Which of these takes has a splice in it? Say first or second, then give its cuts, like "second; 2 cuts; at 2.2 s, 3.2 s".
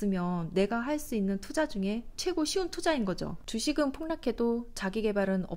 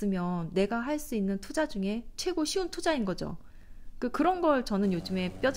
first; 1 cut; at 3.4 s